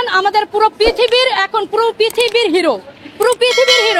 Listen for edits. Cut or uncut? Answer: uncut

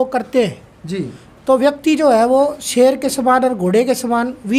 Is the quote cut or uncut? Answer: uncut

